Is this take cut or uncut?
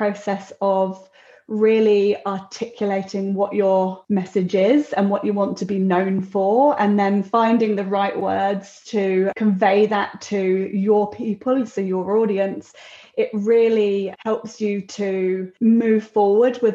cut